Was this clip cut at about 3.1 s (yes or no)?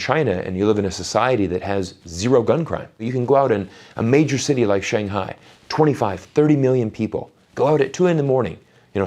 yes